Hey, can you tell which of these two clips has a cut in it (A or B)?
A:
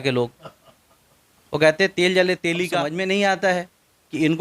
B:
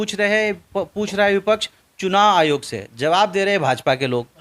A